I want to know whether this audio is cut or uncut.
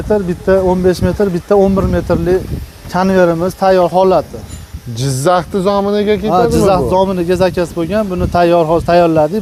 uncut